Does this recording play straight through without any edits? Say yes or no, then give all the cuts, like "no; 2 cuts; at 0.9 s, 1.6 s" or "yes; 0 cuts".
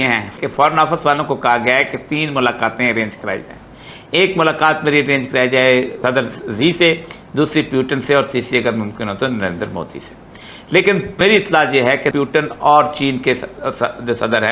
yes; 0 cuts